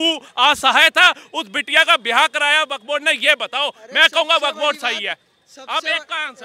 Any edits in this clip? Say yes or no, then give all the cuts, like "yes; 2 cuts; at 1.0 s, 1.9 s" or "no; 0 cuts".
no; 0 cuts